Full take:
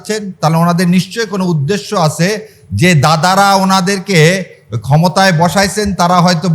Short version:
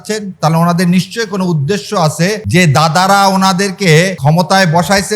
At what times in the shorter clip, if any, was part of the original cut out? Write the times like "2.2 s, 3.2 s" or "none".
2.4 s, 4.2 s